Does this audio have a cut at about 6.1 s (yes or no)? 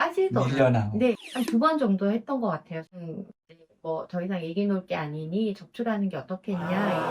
no